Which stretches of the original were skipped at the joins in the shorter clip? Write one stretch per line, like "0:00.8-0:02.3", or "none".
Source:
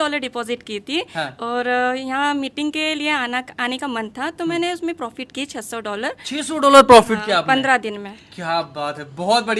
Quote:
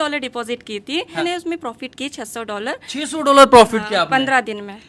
0:01.2-0:04.6